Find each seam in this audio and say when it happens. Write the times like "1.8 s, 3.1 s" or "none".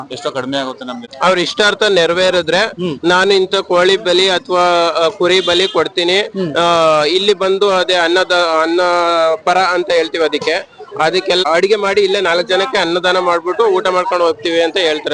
1.0 s, 11.4 s